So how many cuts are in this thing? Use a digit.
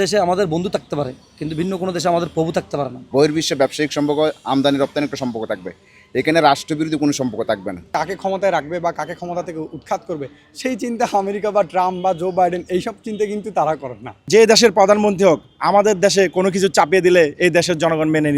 3